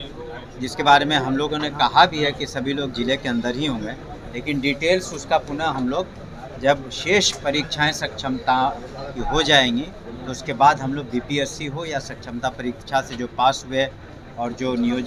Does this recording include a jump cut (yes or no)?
no